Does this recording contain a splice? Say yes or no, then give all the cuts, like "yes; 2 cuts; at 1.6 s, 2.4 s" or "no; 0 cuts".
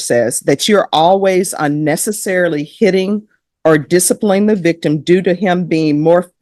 no; 0 cuts